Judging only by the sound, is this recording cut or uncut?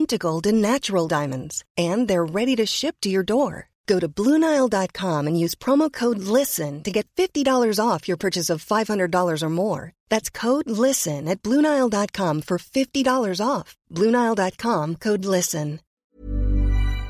cut